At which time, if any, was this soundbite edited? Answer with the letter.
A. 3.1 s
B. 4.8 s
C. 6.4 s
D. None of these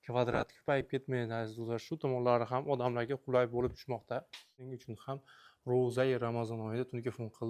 B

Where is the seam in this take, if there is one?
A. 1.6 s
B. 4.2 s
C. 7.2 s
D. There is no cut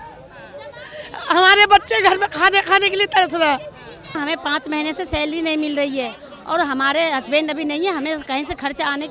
B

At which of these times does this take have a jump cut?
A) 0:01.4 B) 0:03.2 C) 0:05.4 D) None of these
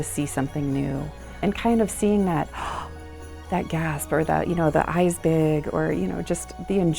A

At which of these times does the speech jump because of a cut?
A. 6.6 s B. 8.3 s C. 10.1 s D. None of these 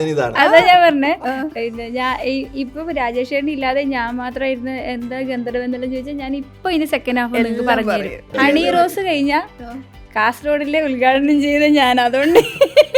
B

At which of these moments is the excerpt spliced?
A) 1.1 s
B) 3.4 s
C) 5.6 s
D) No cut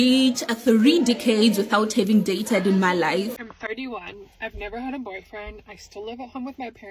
B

